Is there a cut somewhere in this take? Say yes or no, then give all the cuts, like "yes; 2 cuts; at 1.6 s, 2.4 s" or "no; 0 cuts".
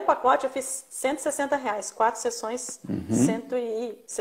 no; 0 cuts